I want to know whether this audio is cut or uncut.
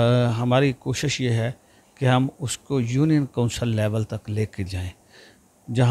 uncut